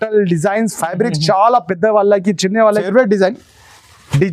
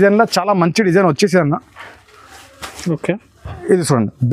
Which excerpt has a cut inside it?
first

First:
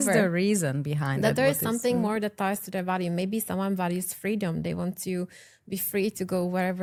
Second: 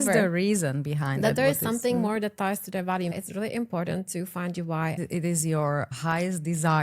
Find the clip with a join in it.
second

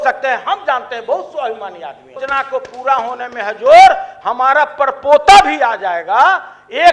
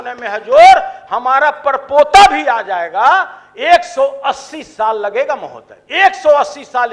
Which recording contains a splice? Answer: first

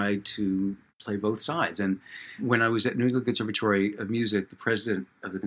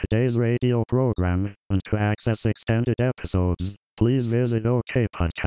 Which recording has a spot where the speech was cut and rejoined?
first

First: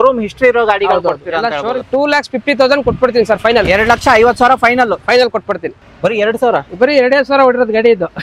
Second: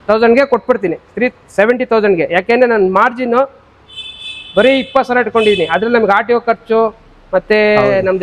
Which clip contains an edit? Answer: first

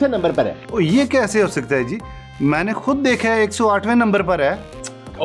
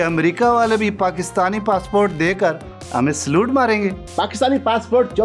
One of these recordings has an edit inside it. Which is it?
second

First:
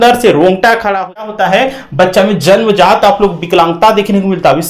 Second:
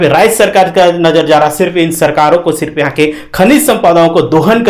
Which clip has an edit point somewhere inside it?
first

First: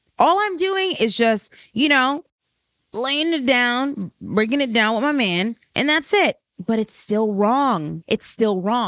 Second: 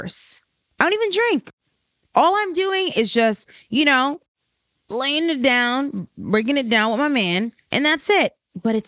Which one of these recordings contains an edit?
first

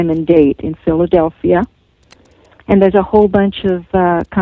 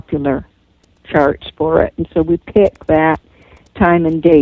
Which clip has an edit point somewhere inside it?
second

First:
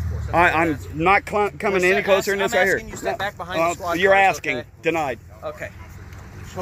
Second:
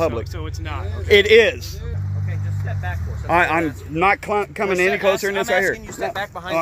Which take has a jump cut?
second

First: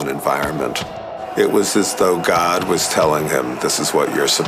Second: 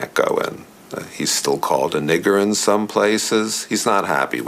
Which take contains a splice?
second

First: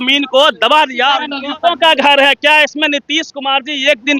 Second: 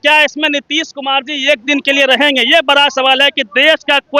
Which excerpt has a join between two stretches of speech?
first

